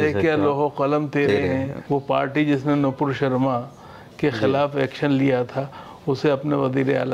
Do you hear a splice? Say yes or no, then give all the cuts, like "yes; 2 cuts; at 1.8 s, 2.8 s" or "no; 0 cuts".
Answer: yes; 1 cut; at 1.8 s